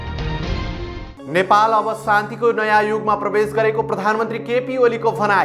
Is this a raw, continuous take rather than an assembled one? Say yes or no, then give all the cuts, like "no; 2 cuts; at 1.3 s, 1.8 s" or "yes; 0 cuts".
yes; 0 cuts